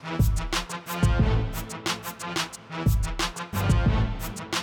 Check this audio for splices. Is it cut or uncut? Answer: cut